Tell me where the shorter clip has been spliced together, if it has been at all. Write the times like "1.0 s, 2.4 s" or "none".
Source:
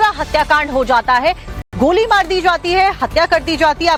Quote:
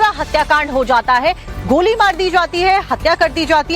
1.5 s